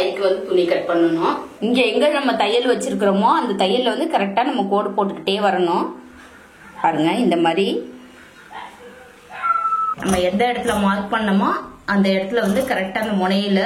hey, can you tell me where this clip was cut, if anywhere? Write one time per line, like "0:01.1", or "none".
0:01.5
0:09.9

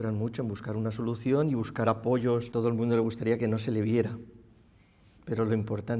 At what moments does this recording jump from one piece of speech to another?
0:02.5

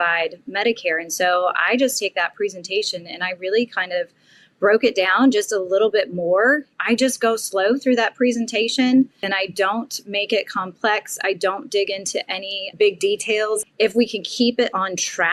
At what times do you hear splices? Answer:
0:06.7
0:09.2
0:12.7
0:13.6

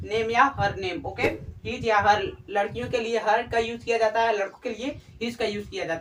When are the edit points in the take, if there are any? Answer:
none

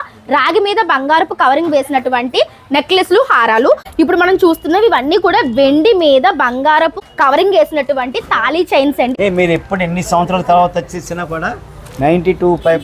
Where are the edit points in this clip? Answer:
0:03.9
0:07.0
0:09.1

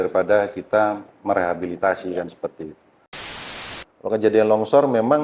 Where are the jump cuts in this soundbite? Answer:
0:03.4

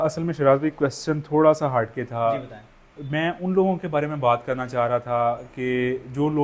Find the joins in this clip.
none

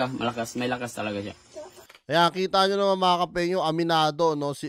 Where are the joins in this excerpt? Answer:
none

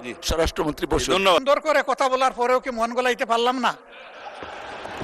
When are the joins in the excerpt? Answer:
0:01.4

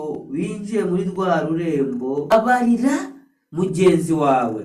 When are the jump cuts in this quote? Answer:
0:02.3

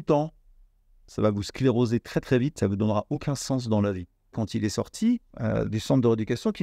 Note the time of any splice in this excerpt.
0:04.4
0:05.3

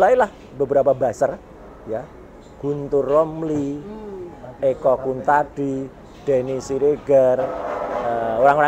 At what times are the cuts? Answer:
none

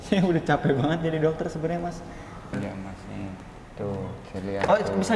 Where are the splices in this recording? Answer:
0:02.5

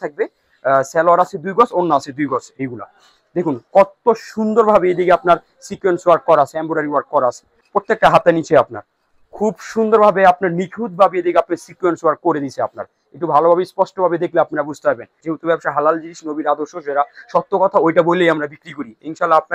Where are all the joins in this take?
0:02.6
0:07.5
0:15.2

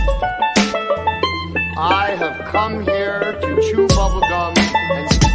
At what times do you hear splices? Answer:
0:01.2

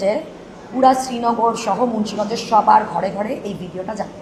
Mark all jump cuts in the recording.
none

